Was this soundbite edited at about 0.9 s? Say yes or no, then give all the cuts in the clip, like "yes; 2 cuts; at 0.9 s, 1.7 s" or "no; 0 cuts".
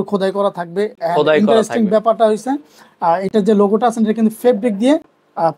no; 0 cuts